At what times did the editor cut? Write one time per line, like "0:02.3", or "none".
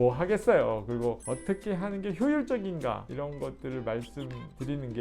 0:01.2
0:03.1